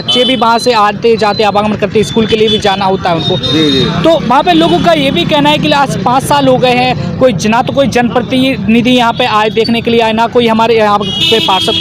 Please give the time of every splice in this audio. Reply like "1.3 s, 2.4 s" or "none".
none